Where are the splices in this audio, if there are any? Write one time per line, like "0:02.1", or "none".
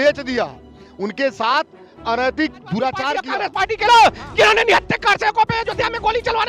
0:03.3